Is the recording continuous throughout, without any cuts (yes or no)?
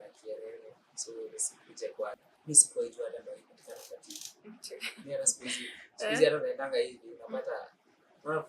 no